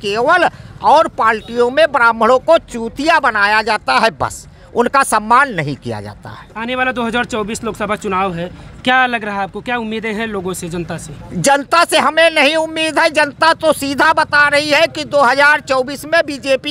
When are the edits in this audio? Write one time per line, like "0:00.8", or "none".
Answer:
none